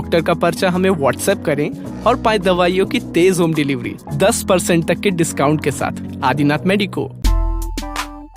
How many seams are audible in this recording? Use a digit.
1